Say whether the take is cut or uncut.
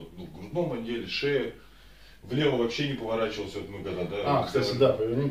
uncut